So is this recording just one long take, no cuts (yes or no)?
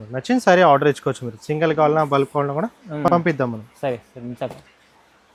yes